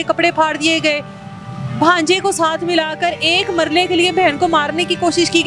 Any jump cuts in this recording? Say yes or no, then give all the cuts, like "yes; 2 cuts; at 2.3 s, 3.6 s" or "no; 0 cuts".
no; 0 cuts